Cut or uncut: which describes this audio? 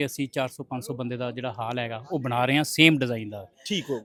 uncut